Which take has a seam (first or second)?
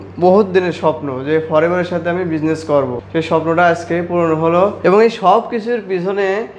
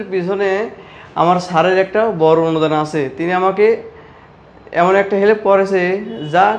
first